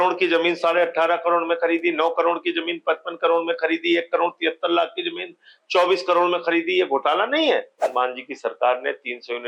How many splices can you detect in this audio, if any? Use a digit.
1